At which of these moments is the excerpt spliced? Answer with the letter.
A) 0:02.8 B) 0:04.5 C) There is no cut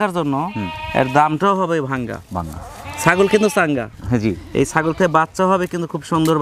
C